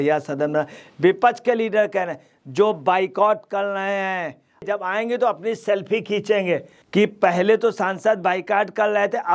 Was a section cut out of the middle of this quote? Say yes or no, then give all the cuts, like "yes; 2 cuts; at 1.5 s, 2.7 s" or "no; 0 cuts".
yes; 2 cuts; at 4.6 s, 6.8 s